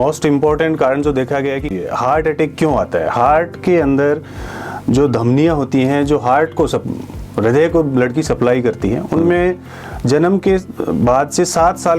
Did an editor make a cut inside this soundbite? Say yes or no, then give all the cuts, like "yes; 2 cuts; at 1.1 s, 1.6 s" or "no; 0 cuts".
yes; 1 cut; at 1.7 s